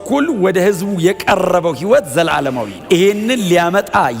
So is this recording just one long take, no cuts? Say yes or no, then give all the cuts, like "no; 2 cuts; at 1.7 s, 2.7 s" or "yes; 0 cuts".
no; 1 cut; at 2.7 s